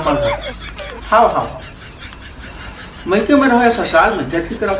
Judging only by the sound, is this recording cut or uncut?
uncut